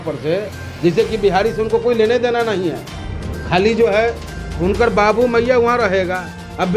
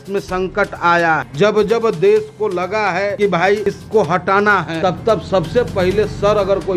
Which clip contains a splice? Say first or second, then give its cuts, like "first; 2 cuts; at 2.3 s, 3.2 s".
second; 3 cuts; at 1.3 s, 3.4 s, 4.7 s